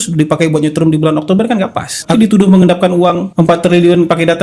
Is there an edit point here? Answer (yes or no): yes